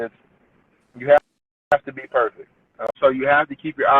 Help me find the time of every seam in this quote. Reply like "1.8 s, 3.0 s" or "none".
2.9 s

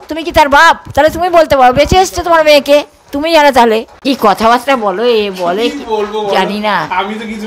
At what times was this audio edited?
3.9 s

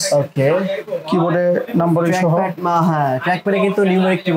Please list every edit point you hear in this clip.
none

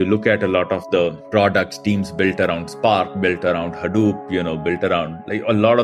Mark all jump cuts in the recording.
none

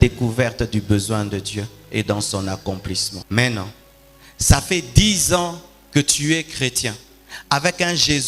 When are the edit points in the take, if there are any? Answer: 3.1 s

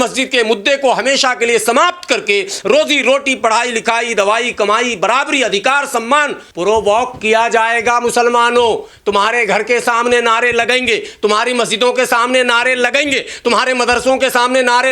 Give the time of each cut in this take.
6.4 s

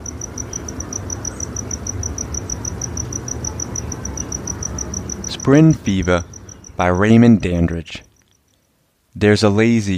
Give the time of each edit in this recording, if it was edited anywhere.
5.4 s

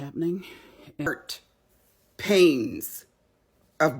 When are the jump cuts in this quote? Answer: 1.1 s

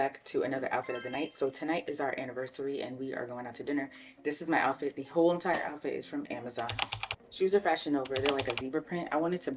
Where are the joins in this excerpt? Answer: none

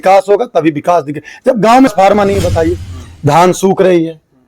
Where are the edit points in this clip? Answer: 1.9 s

